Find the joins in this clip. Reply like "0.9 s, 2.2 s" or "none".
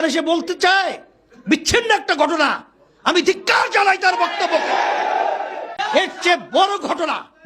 5.7 s